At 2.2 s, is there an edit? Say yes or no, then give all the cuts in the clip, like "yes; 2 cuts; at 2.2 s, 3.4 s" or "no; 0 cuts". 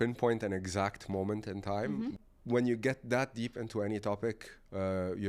yes; 1 cut; at 2.2 s